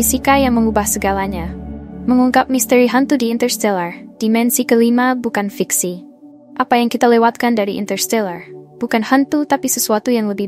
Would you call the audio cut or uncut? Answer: uncut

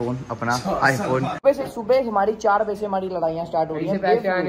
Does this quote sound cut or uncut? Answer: cut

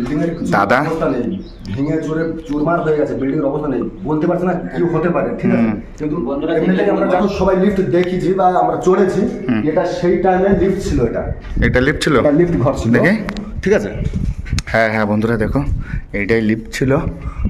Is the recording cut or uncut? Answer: cut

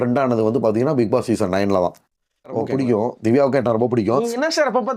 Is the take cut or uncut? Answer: cut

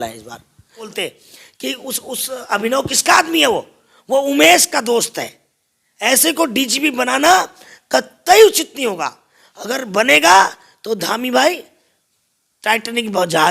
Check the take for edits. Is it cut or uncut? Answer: cut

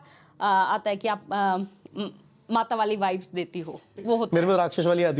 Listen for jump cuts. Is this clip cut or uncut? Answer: uncut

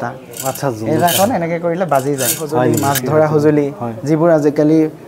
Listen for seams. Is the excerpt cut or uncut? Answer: cut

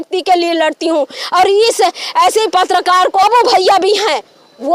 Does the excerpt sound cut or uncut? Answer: cut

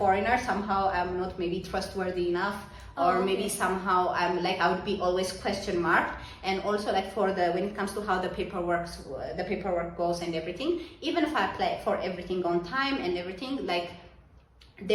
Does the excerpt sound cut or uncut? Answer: uncut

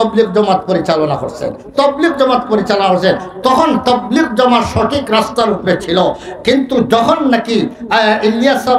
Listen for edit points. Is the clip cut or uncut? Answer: uncut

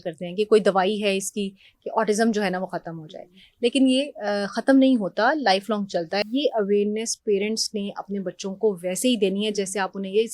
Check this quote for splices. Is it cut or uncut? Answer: cut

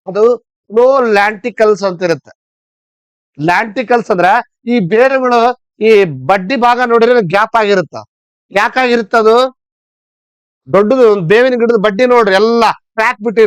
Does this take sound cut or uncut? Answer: uncut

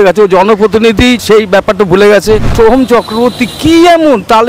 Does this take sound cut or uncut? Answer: cut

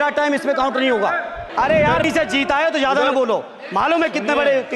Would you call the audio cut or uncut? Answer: cut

